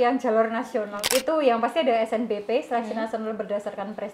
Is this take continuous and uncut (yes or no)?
no